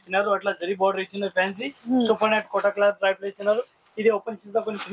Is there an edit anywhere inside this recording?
no; 0 cuts

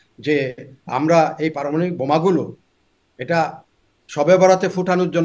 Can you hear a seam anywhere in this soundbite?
no; 0 cuts

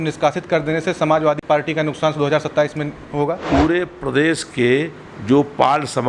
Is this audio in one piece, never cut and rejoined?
no; 2 cuts; at 1.4 s, 3.4 s

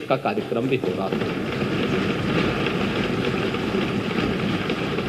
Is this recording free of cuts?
yes; 0 cuts

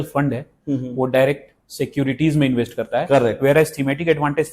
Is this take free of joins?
yes; 0 cuts

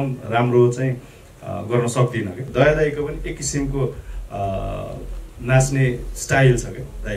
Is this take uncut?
no; 1 cut; at 2.5 s

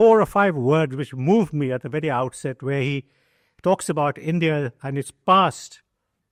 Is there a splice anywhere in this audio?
no; 0 cuts

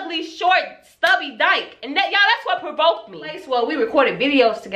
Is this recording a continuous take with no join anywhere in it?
no; 1 cut; at 3.4 s

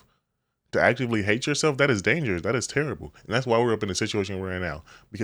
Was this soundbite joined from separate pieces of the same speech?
no; 0 cuts

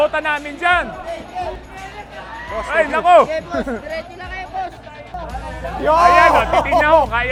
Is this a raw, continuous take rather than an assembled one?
yes; 0 cuts

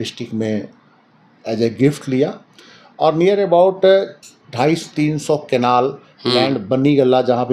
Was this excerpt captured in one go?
yes; 0 cuts

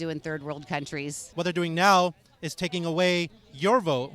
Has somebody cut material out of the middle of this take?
yes; 1 cut; at 1.2 s

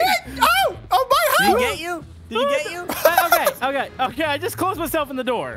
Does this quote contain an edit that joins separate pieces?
no; 0 cuts

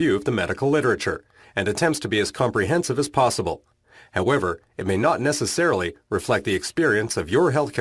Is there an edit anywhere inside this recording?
no; 0 cuts

